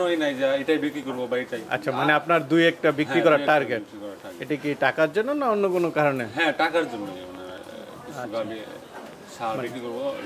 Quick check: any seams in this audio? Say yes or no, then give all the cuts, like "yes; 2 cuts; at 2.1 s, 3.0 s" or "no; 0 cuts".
no; 0 cuts